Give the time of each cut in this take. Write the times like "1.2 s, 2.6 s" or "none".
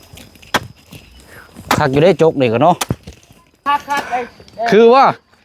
3.6 s

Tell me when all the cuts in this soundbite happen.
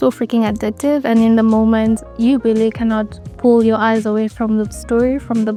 none

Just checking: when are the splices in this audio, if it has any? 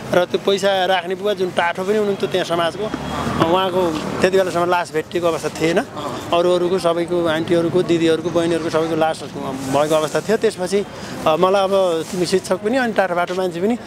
none

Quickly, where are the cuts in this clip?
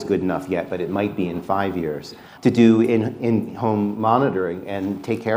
2.3 s

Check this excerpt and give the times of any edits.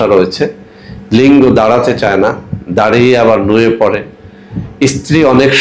none

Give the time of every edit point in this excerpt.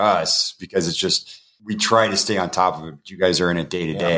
1.5 s

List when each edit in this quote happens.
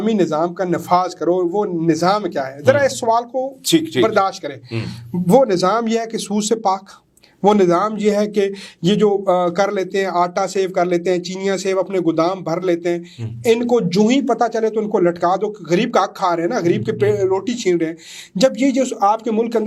none

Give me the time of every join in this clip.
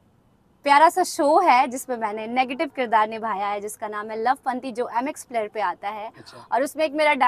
none

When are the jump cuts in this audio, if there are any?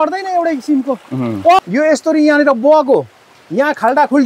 1.6 s

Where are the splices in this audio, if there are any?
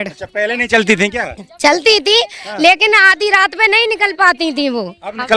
none

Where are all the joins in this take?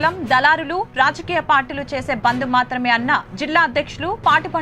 none

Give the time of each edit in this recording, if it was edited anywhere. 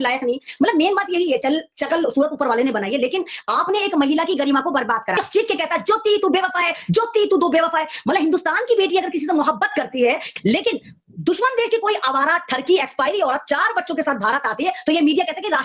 5.2 s, 10.2 s

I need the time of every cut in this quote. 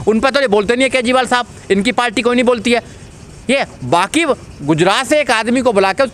none

